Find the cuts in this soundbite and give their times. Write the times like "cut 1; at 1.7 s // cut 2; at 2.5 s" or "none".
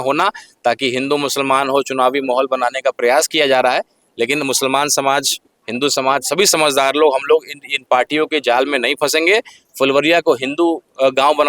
cut 1; at 9.6 s